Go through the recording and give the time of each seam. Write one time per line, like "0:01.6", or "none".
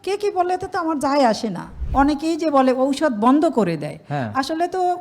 0:01.8